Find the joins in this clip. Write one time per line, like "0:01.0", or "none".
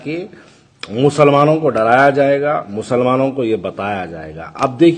none